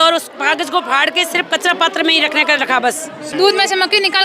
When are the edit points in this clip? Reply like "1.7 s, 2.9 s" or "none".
3.2 s